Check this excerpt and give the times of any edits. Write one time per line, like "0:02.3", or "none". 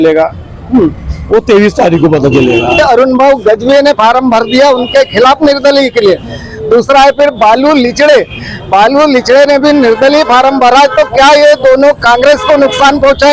0:02.8